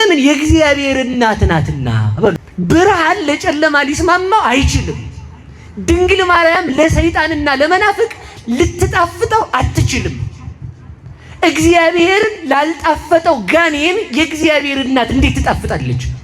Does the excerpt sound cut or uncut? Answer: cut